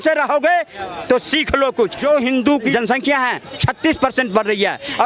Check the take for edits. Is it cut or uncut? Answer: cut